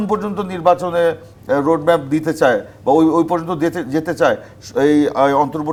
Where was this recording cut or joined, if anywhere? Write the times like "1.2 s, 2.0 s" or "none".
none